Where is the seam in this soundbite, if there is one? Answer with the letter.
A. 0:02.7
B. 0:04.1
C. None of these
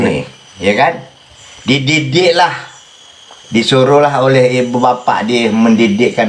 C